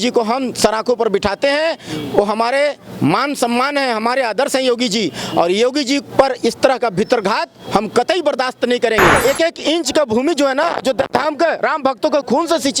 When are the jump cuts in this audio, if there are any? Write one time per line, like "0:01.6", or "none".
0:09.2